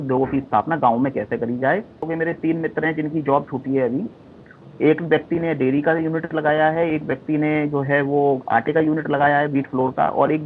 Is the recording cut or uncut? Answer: cut